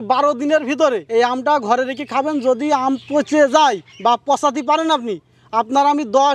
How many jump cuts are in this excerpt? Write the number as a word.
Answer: zero